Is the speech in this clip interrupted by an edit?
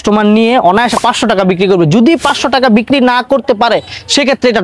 no; 0 cuts

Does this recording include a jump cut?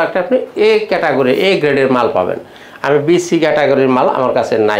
no; 0 cuts

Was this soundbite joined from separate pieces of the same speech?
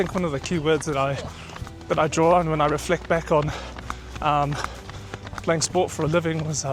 no; 0 cuts

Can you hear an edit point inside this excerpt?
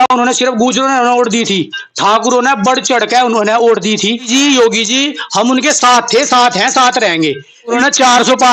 yes; 2 cuts; at 4.3 s, 7.8 s

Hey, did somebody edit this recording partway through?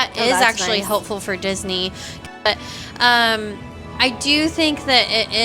yes; 1 cut; at 2.5 s

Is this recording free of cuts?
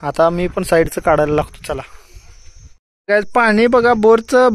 yes; 0 cuts

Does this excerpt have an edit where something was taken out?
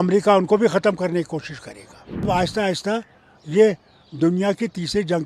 yes; 1 cut; at 2.3 s

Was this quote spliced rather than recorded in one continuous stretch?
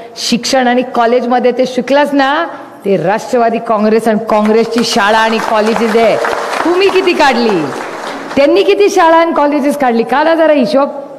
no; 0 cuts

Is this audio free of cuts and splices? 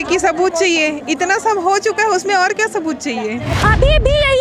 no; 1 cut; at 3.4 s

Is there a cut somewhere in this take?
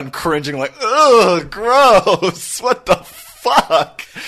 no; 0 cuts

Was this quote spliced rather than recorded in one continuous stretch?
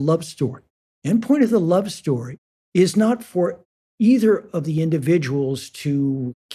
no; 0 cuts

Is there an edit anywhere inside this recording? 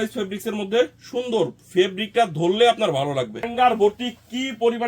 yes; 1 cut; at 3.5 s

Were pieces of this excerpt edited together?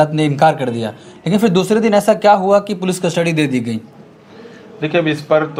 no; 0 cuts

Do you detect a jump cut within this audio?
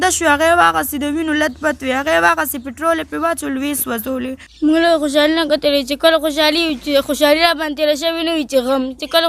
yes; 1 cut; at 4.4 s

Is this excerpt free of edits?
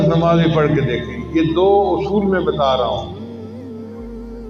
yes; 0 cuts

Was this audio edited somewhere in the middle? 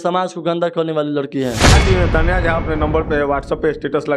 yes; 1 cut; at 1.8 s

